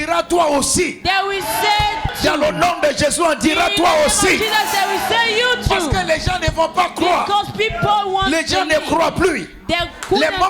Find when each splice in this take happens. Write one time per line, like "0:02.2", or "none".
0:02.1

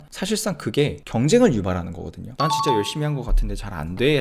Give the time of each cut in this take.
0:02.3

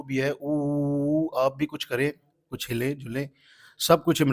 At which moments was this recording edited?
none

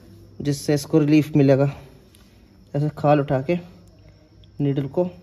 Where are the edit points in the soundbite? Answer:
none

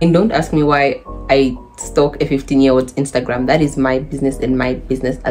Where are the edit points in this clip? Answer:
none

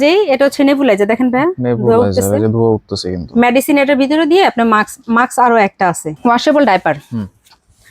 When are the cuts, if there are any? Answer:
0:06.1

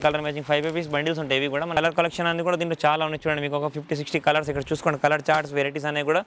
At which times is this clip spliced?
0:01.8

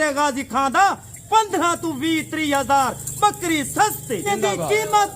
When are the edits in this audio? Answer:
0:04.2

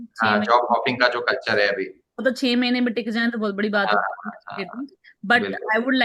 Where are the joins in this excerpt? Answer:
none

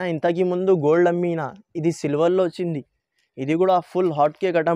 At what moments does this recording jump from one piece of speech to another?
none

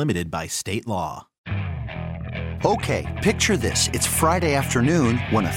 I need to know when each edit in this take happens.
0:01.4

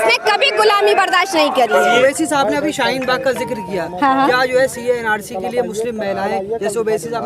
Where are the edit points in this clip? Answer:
0:02.0

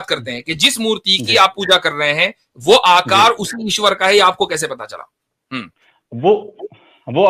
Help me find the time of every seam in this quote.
none

